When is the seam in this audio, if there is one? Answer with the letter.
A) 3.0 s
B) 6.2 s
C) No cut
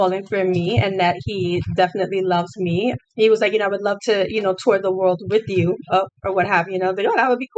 A